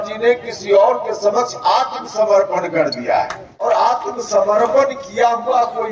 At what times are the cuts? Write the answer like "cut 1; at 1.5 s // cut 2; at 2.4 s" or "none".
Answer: cut 1; at 3.6 s